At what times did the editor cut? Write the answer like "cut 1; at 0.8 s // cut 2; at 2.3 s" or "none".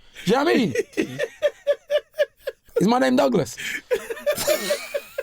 cut 1; at 0.9 s // cut 2; at 2.6 s